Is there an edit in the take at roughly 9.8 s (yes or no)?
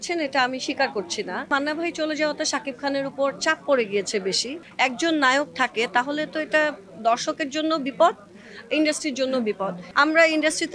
yes